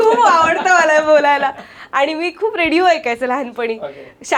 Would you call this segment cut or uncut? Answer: uncut